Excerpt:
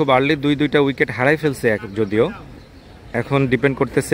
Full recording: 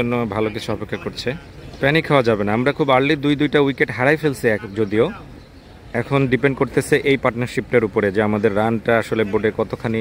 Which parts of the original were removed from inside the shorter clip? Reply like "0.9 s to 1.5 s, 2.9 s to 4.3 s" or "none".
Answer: none